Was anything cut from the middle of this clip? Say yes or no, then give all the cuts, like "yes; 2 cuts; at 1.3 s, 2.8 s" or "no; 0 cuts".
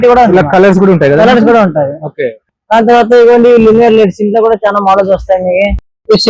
no; 0 cuts